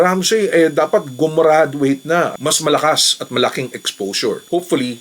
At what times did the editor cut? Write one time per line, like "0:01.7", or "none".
0:02.3